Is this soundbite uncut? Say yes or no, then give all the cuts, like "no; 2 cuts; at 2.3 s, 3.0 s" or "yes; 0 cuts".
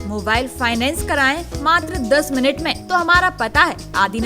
no; 1 cut; at 2.8 s